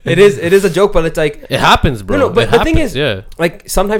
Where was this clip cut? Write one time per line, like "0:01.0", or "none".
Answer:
none